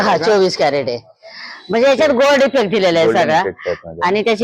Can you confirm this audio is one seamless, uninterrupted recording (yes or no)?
yes